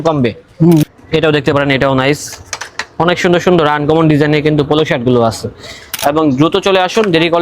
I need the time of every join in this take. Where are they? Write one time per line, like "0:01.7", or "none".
0:00.8
0:05.8